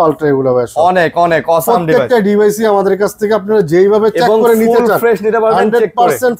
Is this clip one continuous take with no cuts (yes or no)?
yes